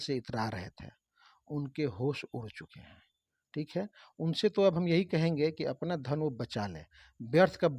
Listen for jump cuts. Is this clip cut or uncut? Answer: uncut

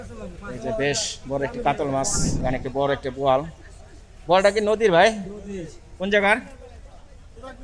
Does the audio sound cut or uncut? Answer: cut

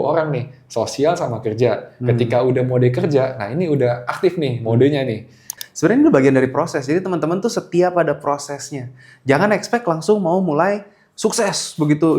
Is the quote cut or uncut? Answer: cut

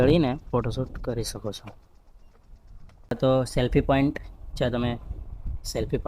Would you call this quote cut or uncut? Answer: cut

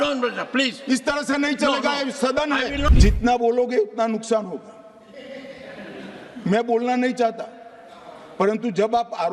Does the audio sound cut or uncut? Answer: cut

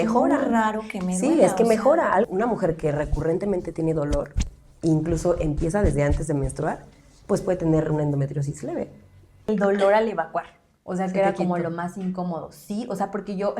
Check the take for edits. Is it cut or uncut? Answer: cut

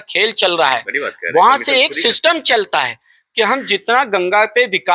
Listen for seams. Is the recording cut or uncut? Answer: uncut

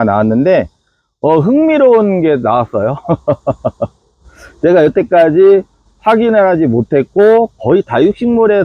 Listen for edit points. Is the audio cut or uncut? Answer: uncut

